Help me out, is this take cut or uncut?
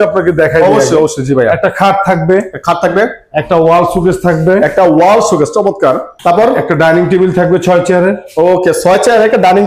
uncut